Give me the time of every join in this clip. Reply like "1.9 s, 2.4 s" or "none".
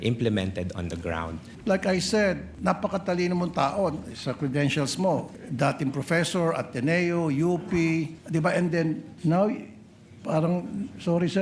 1.5 s, 2.5 s, 5.4 s, 8.2 s, 9.1 s

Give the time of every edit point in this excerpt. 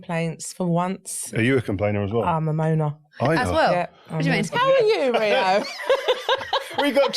1.3 s, 4.6 s

